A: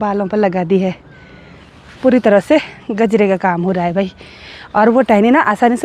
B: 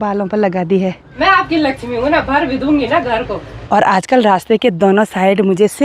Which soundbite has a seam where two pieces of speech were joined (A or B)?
B